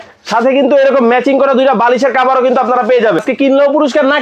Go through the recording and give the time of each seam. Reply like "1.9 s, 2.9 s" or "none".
3.2 s